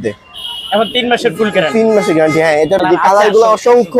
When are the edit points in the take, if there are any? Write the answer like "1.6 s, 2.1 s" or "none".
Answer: 2.8 s